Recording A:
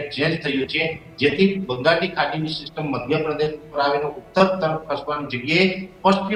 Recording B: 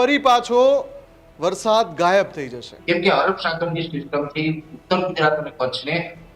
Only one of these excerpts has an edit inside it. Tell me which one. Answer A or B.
B